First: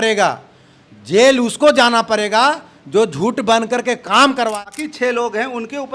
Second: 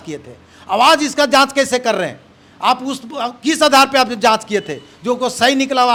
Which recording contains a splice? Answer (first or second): first